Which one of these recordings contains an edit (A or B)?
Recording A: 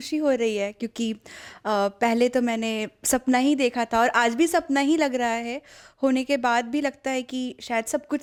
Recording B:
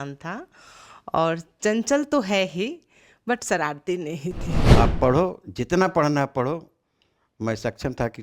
B